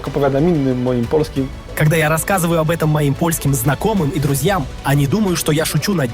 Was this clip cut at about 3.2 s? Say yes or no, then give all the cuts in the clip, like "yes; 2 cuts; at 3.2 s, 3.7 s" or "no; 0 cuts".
no; 1 cut; at 1.5 s